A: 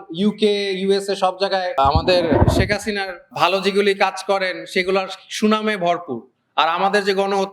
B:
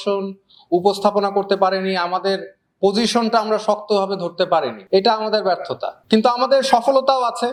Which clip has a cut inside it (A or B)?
A